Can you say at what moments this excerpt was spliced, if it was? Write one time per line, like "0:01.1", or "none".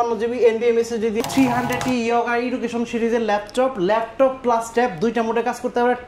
0:01.2